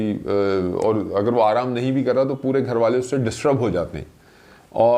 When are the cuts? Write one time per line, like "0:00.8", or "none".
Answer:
none

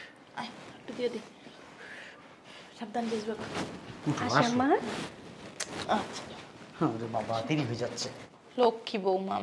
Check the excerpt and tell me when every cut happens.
none

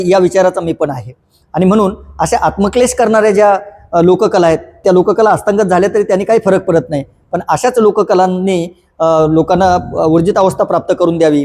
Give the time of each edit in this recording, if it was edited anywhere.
none

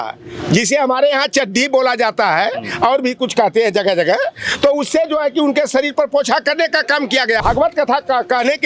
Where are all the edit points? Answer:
0:07.4

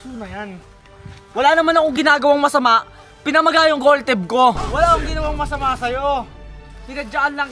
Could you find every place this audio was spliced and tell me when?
0:04.7

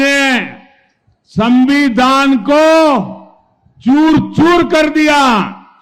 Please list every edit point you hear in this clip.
none

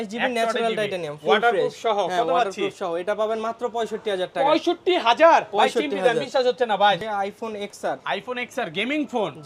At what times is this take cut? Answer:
0:07.0

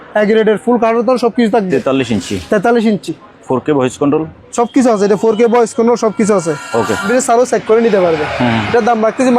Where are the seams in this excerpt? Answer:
0:07.1

